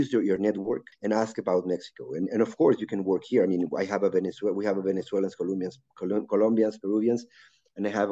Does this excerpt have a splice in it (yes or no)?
yes